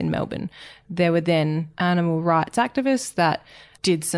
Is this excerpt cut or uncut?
cut